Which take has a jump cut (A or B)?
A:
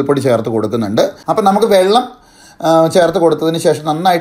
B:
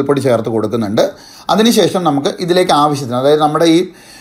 A